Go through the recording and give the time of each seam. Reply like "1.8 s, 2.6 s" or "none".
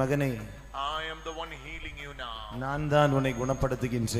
none